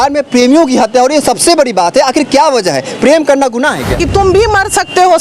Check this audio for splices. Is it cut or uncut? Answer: cut